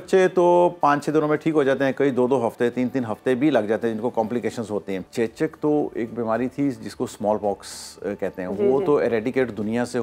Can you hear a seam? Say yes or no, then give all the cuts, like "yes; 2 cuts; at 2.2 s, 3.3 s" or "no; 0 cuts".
yes; 1 cut; at 5.1 s